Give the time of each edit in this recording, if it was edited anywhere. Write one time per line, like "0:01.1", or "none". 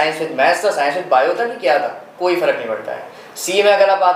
none